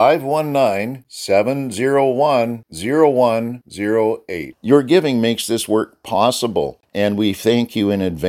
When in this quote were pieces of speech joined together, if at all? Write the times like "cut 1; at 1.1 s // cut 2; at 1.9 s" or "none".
cut 1; at 6.8 s